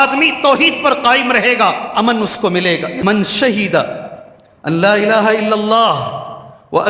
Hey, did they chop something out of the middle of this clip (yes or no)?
yes